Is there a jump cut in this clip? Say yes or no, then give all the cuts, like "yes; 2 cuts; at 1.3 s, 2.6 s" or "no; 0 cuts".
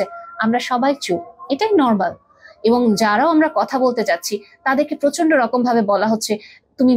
no; 0 cuts